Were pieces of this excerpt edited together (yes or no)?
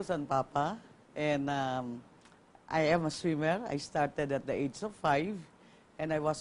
yes